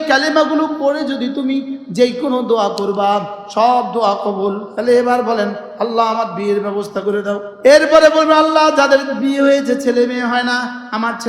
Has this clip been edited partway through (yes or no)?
yes